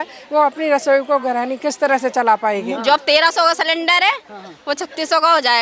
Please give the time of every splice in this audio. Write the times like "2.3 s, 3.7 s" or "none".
2.7 s